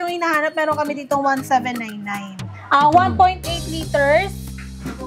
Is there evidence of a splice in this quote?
yes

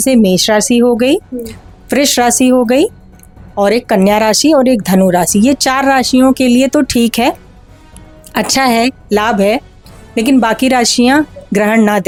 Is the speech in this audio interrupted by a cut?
no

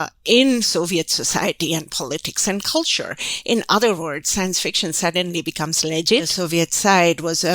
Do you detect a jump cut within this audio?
yes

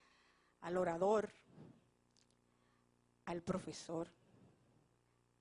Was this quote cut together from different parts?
yes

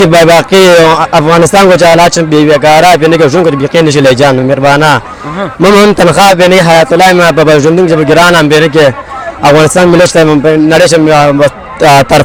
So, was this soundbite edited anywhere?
no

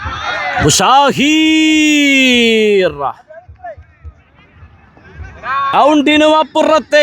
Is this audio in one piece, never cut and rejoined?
no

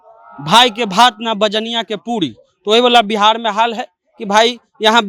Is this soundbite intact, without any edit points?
yes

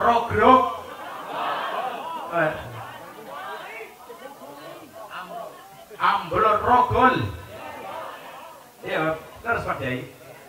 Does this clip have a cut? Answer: no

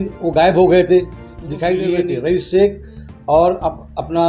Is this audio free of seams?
no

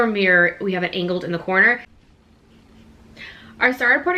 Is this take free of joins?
no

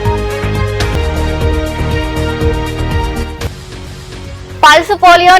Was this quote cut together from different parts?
yes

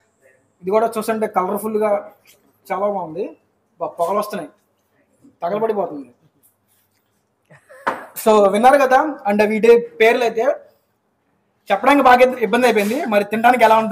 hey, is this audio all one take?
yes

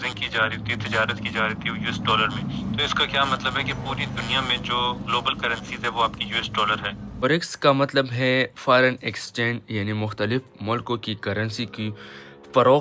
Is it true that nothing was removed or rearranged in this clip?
no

